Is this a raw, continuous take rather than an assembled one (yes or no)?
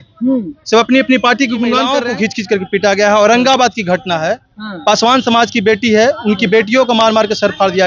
no